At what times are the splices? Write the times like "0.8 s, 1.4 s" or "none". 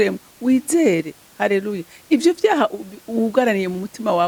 none